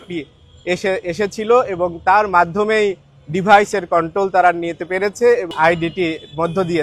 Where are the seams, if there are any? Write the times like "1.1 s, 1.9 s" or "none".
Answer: 5.5 s